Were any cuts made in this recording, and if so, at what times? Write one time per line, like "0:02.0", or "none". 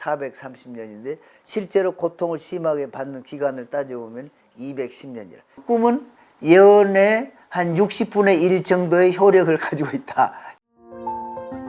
0:05.6
0:10.5